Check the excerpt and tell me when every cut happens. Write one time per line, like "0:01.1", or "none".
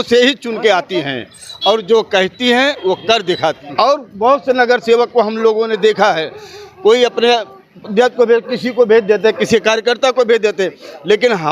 0:03.6